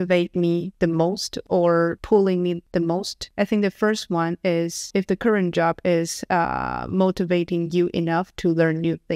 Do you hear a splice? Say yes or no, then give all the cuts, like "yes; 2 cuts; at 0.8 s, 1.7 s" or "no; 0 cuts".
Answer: no; 0 cuts